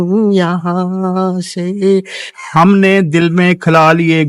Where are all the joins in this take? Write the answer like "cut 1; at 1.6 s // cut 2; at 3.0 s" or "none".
cut 1; at 2.2 s